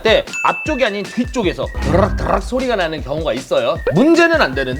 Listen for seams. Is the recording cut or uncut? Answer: cut